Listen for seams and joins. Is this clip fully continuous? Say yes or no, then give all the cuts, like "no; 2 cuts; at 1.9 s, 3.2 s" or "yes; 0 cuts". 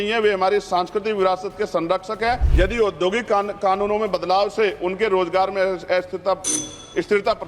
no; 1 cut; at 2.5 s